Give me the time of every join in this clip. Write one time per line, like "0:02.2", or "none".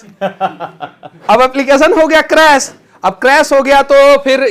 none